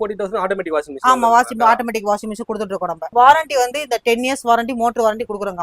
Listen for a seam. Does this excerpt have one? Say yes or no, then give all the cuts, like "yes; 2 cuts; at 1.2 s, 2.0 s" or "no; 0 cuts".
yes; 1 cut; at 3.1 s